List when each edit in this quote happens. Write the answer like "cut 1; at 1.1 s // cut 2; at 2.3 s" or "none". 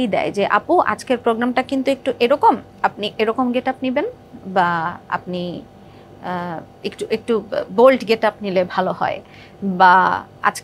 none